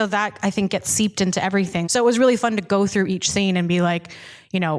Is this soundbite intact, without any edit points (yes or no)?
no